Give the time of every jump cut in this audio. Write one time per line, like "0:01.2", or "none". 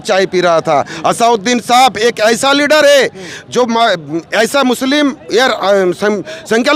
none